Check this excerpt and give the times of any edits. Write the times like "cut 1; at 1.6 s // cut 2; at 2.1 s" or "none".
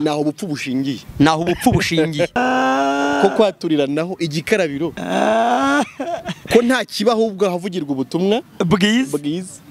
cut 1; at 2.4 s